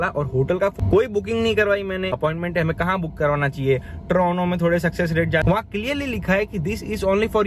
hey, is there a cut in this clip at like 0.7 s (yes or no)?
yes